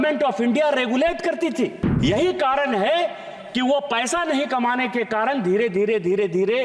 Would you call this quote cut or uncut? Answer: cut